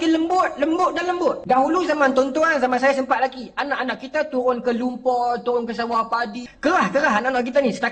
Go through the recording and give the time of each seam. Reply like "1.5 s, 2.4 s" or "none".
1.4 s, 6.4 s